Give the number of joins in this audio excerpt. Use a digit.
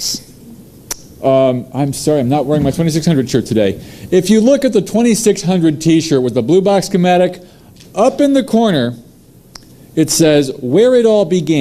0